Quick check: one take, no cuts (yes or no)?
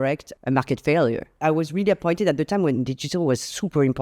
no